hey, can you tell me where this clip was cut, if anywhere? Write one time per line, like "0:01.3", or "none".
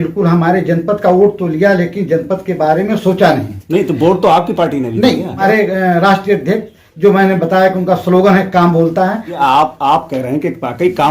0:05.4
0:09.3